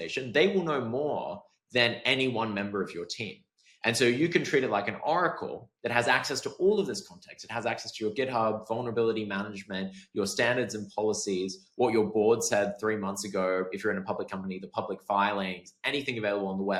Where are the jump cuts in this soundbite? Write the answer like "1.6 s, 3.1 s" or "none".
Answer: none